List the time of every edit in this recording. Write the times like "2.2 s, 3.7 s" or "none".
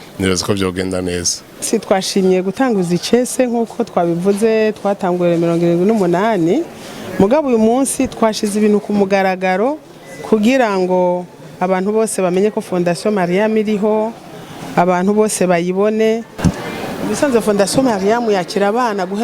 1.6 s, 16.3 s